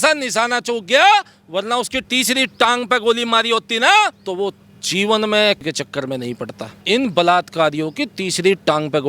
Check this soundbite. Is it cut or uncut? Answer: cut